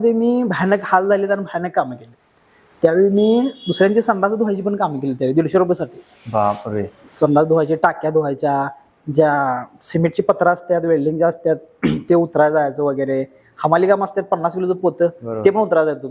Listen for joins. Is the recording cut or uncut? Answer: uncut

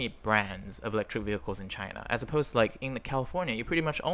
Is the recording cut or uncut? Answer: uncut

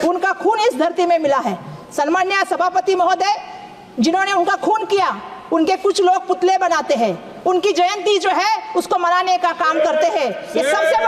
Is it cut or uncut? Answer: uncut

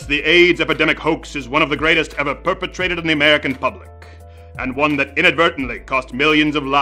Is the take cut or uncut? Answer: uncut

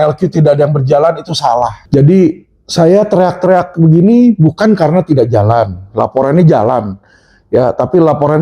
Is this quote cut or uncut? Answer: cut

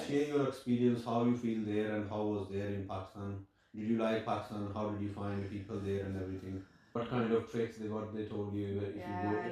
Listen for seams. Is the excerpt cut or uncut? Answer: cut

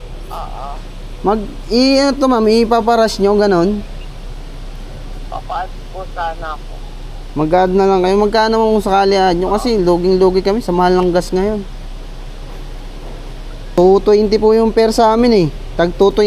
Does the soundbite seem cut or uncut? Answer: cut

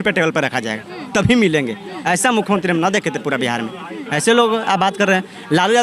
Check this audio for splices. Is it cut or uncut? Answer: uncut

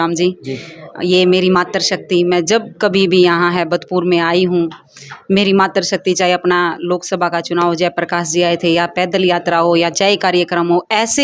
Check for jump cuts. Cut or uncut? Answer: uncut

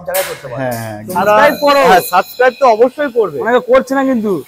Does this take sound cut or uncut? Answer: cut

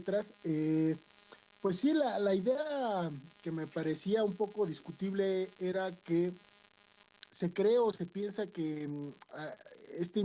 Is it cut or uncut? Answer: cut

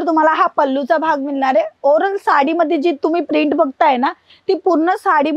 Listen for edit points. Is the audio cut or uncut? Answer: uncut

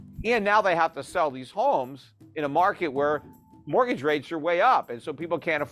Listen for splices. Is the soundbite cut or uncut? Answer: uncut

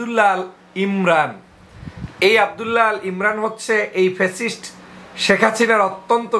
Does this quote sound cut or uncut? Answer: uncut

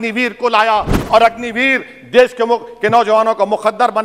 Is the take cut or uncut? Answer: cut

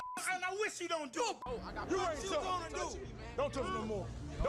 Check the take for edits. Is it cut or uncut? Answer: cut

